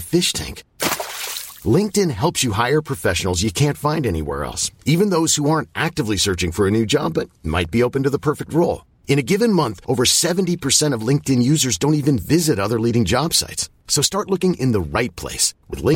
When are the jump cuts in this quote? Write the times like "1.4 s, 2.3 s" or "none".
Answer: none